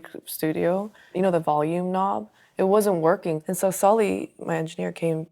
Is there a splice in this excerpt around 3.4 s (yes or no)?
yes